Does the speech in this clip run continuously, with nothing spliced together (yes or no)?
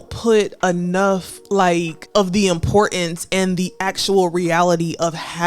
no